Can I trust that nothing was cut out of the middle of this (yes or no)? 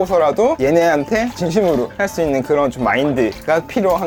yes